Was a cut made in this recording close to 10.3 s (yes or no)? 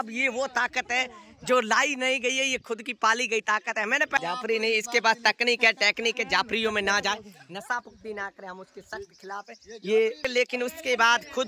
yes